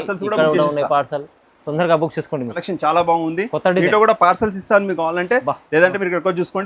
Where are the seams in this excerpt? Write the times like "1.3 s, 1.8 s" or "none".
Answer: 2.6 s